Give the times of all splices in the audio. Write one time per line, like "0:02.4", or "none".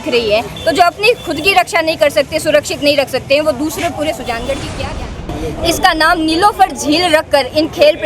0:05.3